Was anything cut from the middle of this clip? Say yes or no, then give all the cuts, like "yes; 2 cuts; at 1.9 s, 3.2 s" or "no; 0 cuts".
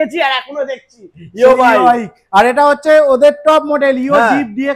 no; 0 cuts